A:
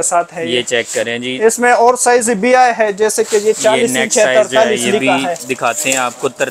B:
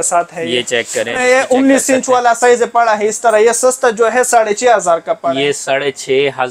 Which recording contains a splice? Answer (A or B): B